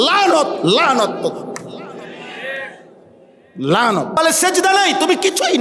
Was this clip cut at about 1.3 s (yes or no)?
no